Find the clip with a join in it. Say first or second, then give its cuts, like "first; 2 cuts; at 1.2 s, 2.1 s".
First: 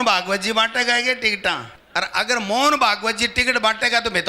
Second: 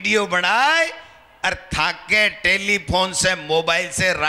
first; 1 cut; at 1.8 s